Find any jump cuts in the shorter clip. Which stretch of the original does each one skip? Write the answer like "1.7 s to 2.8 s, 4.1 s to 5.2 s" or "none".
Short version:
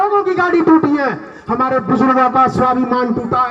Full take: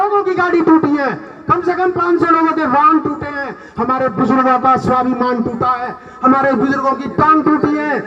1.3 s to 3.6 s

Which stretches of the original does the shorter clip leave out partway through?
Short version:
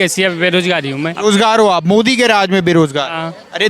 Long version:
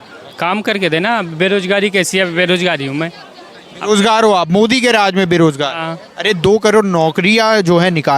3.1 s to 3.8 s

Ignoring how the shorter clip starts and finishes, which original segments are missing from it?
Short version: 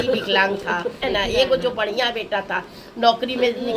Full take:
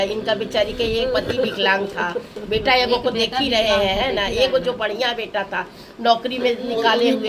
2.3 s to 4.1 s

